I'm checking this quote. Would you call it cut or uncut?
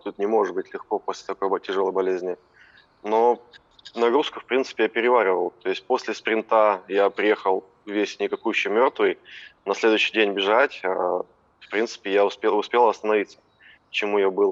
uncut